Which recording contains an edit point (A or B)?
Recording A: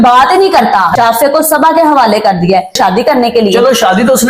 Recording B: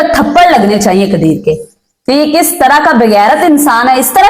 A